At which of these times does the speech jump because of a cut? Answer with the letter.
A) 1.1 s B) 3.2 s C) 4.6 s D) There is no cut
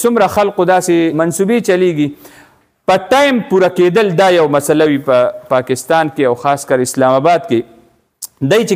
A